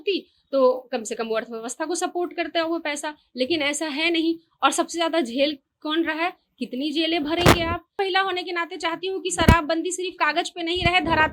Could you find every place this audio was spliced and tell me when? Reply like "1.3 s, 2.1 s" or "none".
7.9 s